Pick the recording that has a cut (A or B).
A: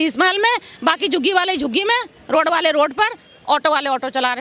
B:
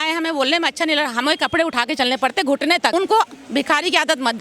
B